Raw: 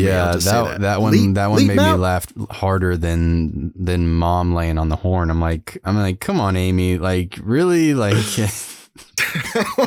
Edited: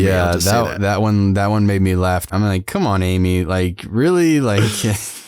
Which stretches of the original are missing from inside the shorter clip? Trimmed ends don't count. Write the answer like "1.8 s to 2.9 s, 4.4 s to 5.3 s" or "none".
2.3 s to 5.8 s